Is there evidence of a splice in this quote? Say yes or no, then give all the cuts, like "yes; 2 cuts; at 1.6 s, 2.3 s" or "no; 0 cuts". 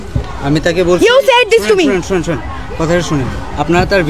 no; 0 cuts